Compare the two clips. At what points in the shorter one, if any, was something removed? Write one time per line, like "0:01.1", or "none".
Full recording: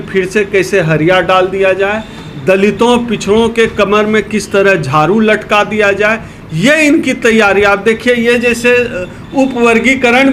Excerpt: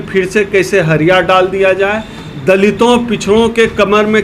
none